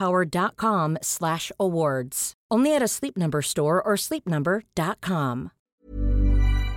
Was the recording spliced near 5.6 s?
yes; 1 cut; at 5.6 s

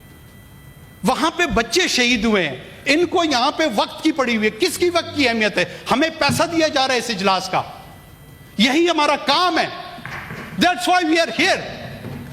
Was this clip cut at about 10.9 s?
no; 0 cuts

